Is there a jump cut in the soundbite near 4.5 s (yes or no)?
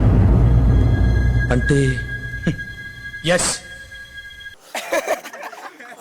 no